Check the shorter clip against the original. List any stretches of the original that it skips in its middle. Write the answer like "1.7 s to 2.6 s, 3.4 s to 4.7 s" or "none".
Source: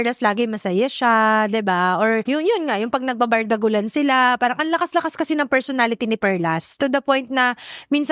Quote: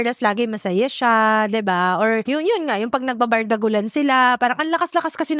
none